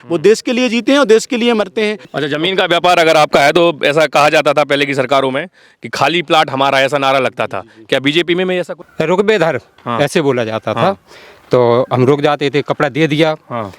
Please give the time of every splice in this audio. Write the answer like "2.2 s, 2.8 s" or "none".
2.1 s, 8.8 s